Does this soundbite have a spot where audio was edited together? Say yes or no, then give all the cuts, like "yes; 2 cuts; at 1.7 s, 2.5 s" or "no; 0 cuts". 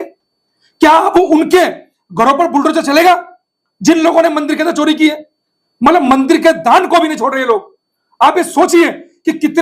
no; 0 cuts